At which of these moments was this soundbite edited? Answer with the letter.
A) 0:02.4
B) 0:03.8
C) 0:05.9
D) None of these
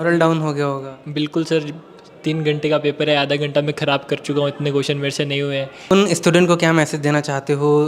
C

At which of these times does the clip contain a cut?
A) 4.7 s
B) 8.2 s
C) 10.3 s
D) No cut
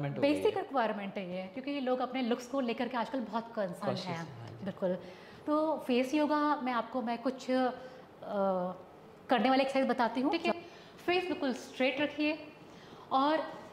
C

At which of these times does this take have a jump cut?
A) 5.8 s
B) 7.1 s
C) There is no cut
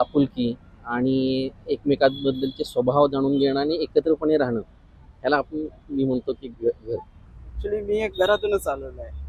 C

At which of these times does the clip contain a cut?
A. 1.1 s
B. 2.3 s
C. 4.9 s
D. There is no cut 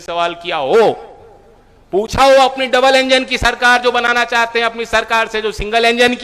D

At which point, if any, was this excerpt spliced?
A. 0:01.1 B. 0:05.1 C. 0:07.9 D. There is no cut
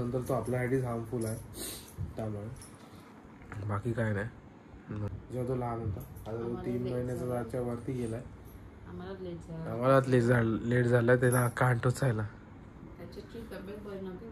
B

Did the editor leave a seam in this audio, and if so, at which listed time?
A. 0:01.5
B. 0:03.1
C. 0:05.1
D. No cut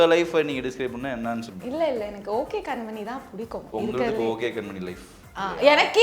A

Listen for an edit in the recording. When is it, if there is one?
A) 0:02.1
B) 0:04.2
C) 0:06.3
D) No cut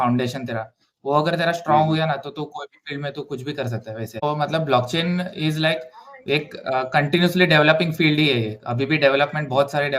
B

